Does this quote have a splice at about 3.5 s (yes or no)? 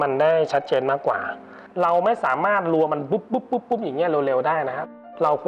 no